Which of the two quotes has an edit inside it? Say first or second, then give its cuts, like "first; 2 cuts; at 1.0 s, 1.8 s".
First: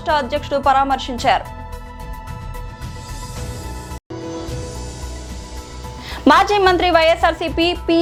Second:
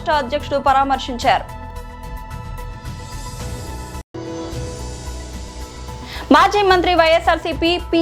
second; 3 cuts; at 1.7 s, 3.7 s, 6.0 s